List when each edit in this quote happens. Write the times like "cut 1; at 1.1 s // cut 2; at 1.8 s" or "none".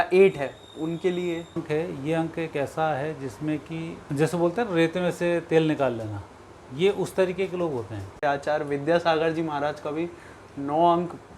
cut 1; at 1.6 s // cut 2; at 4.0 s // cut 3; at 8.2 s